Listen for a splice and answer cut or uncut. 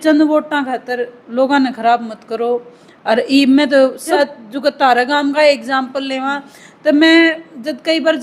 cut